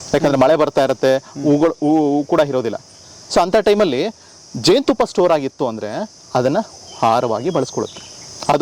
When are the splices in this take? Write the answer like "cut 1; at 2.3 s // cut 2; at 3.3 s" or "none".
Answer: none